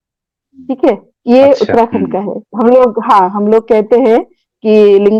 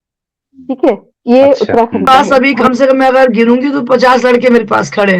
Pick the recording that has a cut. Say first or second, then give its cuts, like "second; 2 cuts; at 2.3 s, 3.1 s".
second; 1 cut; at 2.0 s